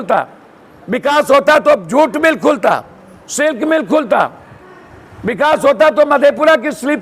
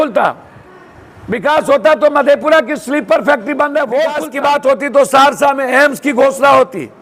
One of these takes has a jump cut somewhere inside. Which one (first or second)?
second